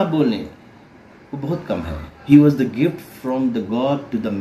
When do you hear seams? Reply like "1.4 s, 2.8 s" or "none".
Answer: 2.1 s